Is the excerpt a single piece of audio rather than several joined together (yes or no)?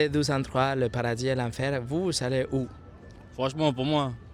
yes